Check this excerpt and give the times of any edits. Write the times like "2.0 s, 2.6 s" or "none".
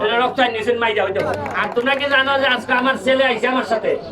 1.3 s